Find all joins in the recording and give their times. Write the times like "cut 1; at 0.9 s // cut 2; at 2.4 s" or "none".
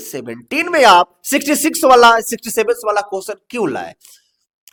none